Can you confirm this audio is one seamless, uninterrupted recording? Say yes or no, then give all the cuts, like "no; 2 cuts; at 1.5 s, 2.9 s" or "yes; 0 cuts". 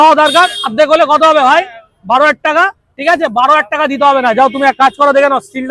yes; 0 cuts